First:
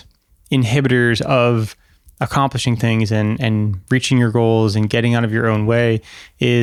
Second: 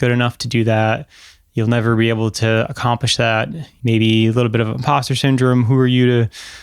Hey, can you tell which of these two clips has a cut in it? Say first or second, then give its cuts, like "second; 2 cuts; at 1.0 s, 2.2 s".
second; 1 cut; at 3.7 s